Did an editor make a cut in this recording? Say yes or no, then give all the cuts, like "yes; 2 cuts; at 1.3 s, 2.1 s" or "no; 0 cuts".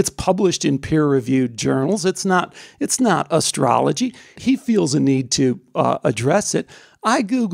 yes; 1 cut; at 4.4 s